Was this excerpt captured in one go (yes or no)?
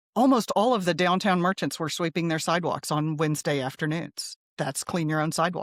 yes